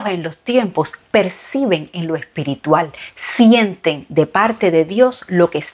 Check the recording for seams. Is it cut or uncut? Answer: uncut